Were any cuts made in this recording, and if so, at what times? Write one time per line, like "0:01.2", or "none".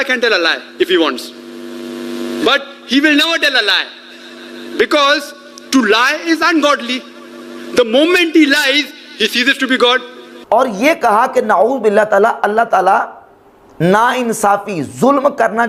none